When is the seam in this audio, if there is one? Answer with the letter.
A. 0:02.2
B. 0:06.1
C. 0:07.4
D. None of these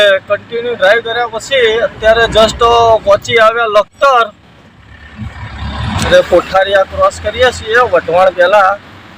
B